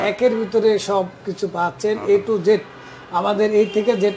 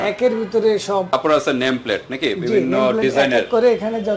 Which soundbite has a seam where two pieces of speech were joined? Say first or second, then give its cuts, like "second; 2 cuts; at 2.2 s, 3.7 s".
second; 1 cut; at 1.1 s